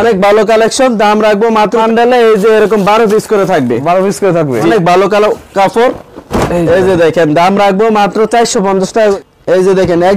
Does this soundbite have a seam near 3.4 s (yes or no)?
no